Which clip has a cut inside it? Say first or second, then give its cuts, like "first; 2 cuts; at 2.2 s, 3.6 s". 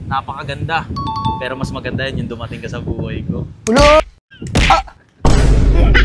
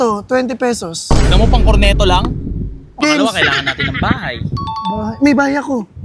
second; 1 cut; at 3.0 s